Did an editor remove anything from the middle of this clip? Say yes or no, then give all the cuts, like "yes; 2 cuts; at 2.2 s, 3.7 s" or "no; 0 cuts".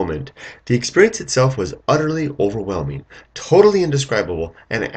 yes; 1 cut; at 2.3 s